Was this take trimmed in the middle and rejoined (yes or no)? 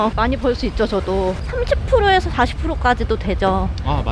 no